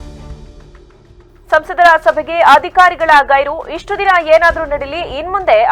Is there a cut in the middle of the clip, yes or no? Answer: yes